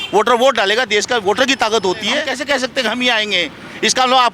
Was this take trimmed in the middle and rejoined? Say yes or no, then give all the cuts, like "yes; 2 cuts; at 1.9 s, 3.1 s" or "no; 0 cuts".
yes; 1 cut; at 2.3 s